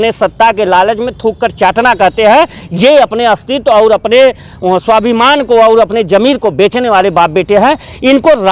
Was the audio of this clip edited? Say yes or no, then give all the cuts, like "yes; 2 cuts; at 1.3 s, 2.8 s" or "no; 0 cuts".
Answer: no; 0 cuts